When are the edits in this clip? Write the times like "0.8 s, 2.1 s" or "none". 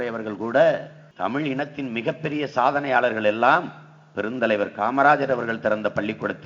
1.0 s